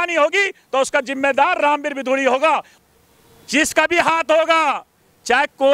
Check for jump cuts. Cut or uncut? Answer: cut